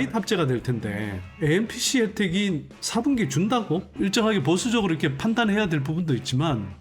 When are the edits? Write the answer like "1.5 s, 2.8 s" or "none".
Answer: 3.9 s